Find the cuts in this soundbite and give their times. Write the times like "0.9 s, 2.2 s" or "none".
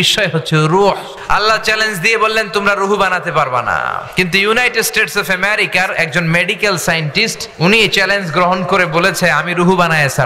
1.1 s, 4.0 s, 7.4 s